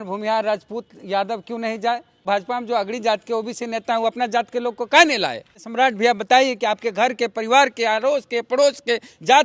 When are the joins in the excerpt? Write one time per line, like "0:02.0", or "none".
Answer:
0:02.2
0:05.6